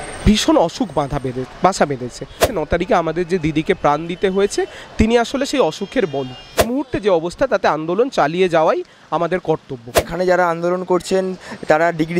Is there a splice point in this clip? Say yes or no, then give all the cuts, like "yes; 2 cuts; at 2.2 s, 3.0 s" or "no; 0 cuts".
yes; 3 cuts; at 2.5 s, 6.6 s, 10.0 s